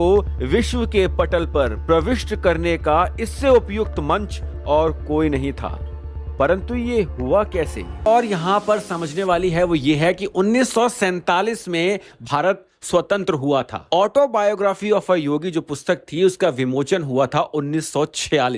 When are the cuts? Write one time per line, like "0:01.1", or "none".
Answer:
0:08.0